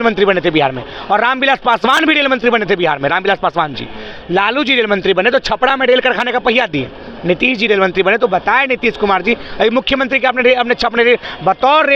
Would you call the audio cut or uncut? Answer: uncut